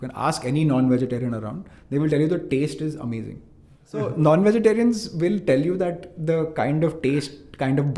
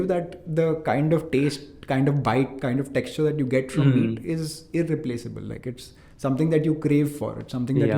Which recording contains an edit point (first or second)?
first